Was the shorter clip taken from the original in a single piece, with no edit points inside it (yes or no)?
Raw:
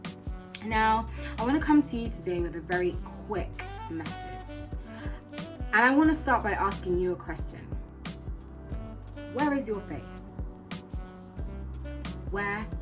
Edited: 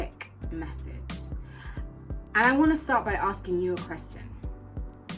yes